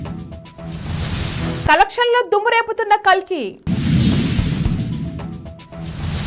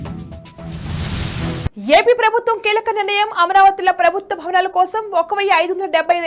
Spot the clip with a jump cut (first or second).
second